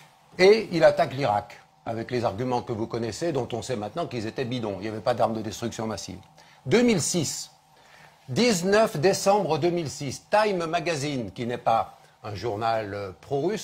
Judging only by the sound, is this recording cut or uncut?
cut